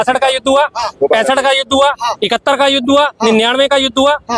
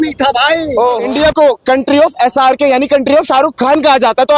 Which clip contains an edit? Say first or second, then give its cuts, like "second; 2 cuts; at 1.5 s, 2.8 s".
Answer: second; 1 cut; at 1.0 s